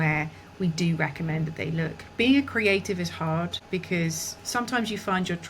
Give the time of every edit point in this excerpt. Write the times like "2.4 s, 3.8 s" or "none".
2.0 s, 4.2 s